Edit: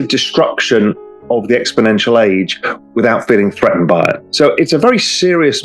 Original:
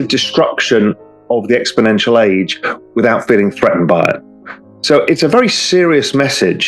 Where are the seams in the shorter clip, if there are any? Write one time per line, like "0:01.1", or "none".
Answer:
0:04.2